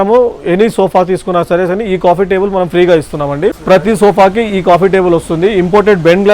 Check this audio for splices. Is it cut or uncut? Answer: cut